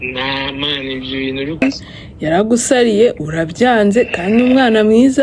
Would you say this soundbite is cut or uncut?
cut